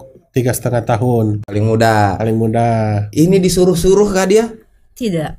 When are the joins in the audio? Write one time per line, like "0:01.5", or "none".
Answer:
none